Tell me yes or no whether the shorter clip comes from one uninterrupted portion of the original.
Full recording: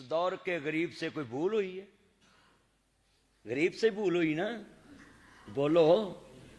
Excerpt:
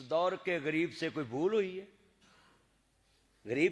yes